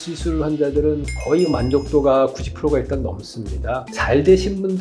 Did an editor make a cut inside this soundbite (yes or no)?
yes